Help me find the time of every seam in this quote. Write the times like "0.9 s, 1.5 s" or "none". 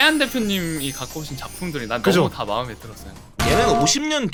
none